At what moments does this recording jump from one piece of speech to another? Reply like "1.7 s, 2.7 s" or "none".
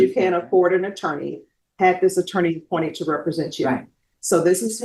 none